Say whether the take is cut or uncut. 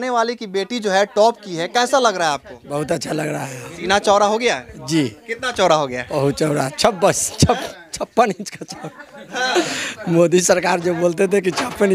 uncut